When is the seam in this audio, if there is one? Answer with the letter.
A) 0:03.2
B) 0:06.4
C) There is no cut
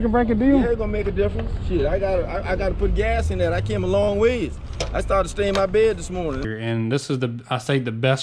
B